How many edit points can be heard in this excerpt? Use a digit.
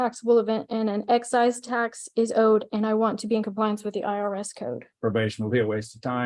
1